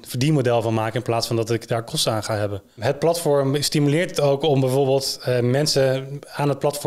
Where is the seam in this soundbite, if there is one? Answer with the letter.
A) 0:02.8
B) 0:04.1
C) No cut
A